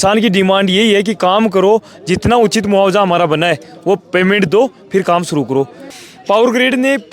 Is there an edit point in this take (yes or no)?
yes